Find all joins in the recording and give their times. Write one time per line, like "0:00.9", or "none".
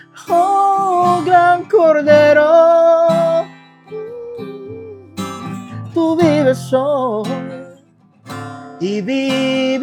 none